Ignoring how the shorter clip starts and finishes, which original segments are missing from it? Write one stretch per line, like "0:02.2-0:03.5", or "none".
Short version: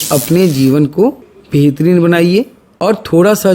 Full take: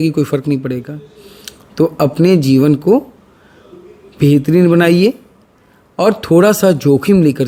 0:03.2-0:04.0
0:05.3-0:05.8